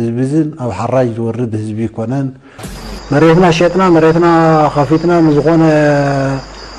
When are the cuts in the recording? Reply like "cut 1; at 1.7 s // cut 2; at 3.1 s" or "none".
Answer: cut 1; at 2.4 s

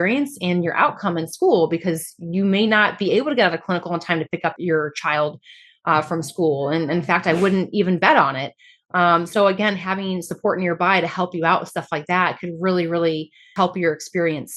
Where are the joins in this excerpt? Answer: cut 1; at 4.5 s // cut 2; at 13.5 s

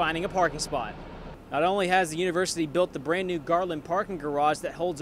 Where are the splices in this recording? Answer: none

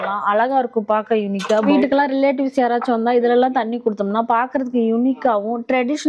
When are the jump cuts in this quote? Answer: cut 1; at 1.7 s

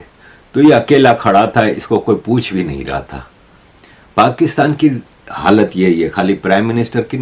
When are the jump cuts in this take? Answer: none

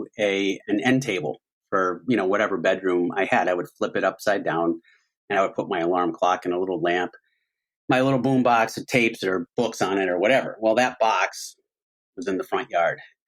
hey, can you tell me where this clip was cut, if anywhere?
none

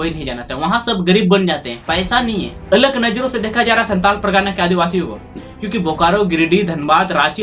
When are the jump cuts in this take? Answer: cut 1; at 2.5 s

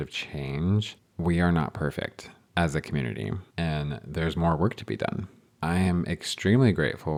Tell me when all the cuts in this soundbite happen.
none

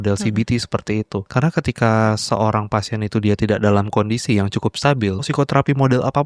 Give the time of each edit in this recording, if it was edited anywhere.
cut 1; at 1.2 s // cut 2; at 5.3 s

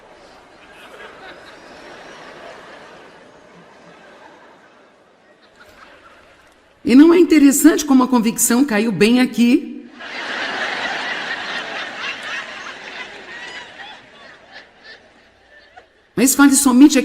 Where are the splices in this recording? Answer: cut 1; at 9.9 s

